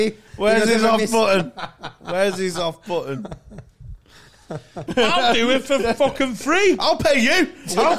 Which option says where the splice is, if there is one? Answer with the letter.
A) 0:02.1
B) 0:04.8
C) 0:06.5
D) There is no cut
B